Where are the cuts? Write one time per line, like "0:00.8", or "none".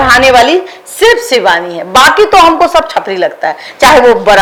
none